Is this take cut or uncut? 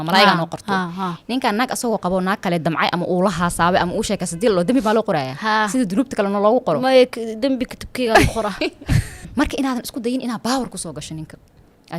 cut